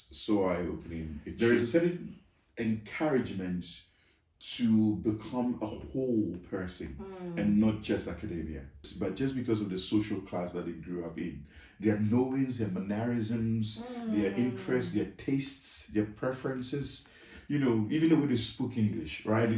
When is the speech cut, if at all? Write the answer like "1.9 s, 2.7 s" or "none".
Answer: 1.2 s, 8.8 s